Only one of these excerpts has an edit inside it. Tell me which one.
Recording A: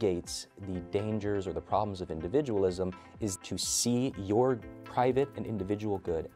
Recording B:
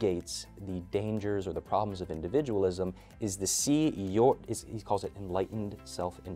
A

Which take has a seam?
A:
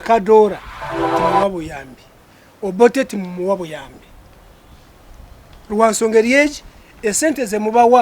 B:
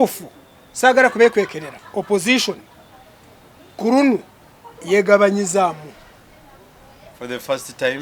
A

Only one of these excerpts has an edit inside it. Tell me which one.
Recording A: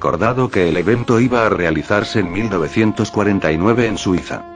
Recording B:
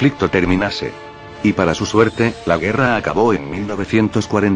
A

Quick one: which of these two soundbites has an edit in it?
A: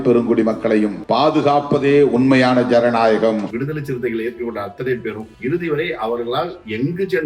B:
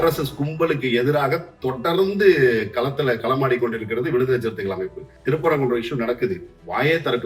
A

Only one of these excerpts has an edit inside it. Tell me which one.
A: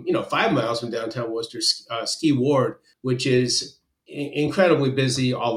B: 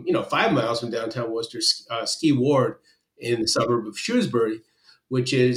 A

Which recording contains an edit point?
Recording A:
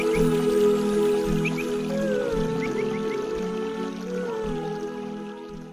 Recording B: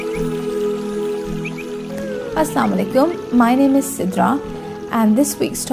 B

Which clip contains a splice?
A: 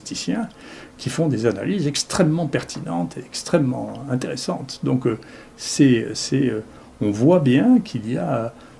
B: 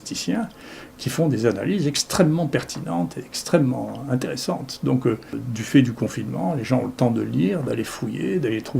B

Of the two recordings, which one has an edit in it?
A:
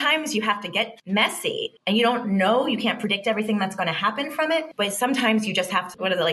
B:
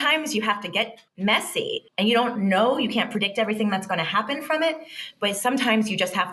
A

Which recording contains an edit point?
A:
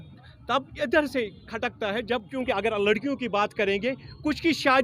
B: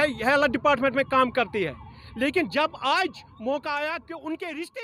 A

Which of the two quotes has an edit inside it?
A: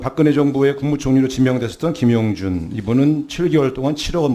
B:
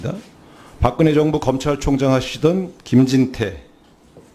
A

